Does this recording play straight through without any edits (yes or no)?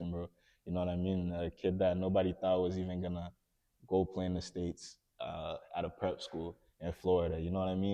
yes